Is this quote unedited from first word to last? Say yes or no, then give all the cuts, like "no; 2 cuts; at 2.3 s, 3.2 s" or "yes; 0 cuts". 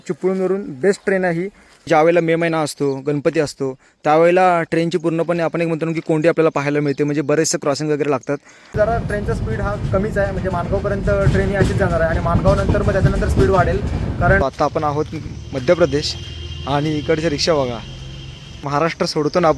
no; 4 cuts; at 1.9 s, 8.7 s, 14.4 s, 18.5 s